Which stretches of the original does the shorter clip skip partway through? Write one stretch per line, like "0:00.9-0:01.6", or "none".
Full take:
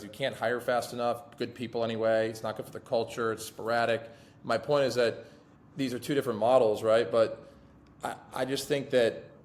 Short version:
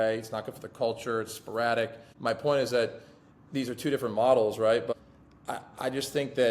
0:04.2-0:04.3
0:07.2-0:07.5